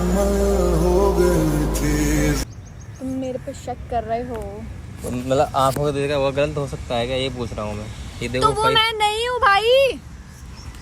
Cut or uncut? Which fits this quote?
uncut